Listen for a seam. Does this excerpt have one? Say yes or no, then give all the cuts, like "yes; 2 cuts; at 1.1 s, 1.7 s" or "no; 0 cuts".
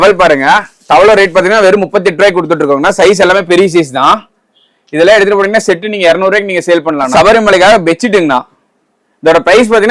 yes; 1 cut; at 7.1 s